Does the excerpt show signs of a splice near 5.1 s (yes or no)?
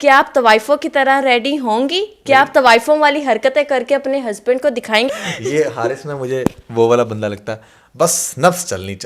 yes